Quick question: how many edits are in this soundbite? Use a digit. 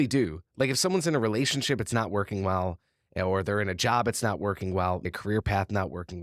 1